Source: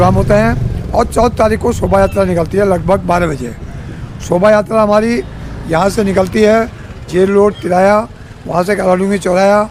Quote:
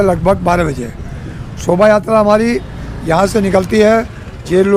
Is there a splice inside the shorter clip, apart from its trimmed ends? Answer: no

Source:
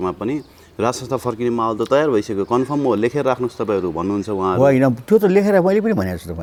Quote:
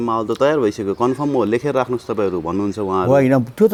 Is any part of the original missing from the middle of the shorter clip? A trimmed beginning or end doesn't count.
no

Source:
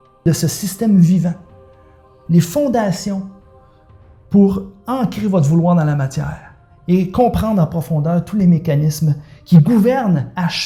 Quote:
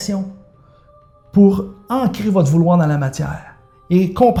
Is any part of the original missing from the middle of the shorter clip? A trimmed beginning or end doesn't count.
no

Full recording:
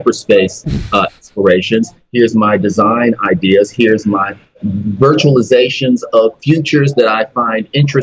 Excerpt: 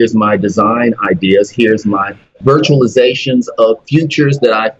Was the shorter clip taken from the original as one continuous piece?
no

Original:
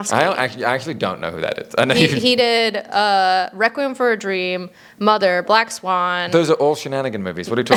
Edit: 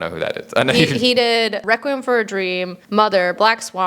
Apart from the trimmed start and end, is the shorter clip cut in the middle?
yes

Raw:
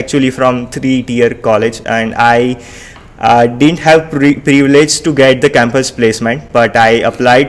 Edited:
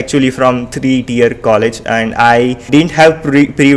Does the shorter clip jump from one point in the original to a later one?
yes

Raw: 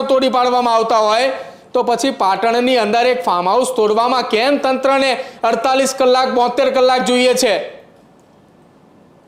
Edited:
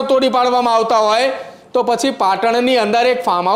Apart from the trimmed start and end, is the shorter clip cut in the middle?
no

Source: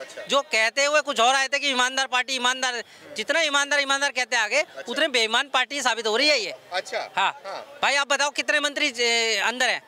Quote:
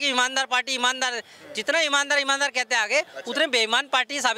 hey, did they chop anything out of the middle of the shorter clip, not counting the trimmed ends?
no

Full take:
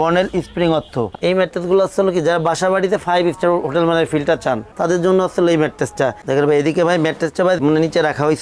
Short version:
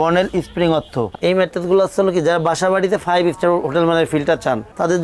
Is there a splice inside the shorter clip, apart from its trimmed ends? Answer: no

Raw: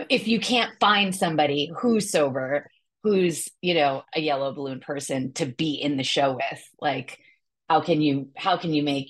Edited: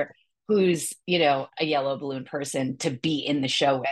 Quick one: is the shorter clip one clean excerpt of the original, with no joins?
yes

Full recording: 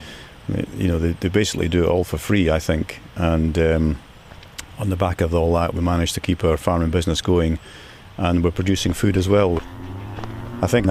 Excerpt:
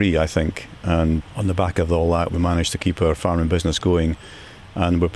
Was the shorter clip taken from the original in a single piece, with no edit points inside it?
no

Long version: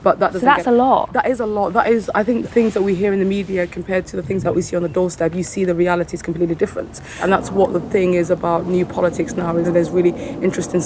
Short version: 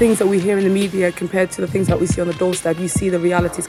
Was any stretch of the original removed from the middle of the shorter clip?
no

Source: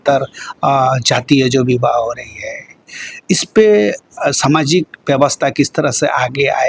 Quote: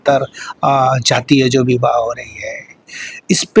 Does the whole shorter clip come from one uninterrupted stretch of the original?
yes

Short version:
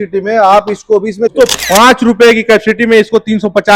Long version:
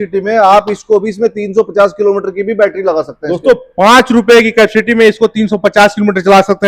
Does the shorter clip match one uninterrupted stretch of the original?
no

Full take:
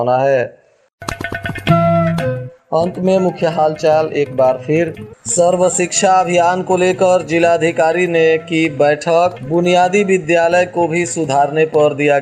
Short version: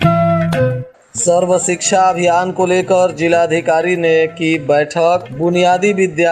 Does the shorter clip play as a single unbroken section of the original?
no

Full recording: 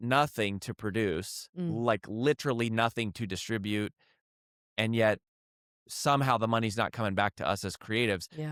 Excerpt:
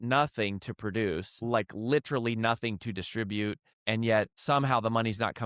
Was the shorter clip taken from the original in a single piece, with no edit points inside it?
no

